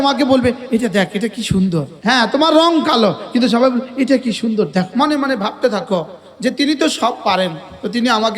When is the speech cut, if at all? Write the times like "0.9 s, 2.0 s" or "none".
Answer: 1.9 s, 4.9 s